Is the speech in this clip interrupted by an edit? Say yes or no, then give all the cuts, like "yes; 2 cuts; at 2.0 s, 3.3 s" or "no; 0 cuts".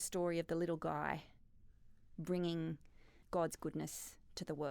no; 0 cuts